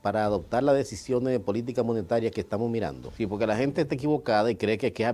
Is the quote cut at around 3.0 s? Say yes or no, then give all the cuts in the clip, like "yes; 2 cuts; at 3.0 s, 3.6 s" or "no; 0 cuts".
yes; 1 cut; at 3.0 s